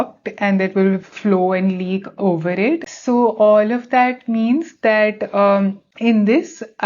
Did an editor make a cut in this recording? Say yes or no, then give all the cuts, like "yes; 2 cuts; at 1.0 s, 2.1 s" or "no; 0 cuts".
yes; 2 cuts; at 2.9 s, 5.9 s